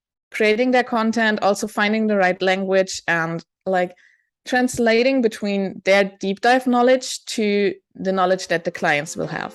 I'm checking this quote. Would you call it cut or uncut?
uncut